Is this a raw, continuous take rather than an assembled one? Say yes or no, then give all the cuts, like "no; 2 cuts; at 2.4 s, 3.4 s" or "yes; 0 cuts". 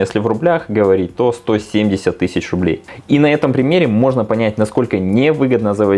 yes; 0 cuts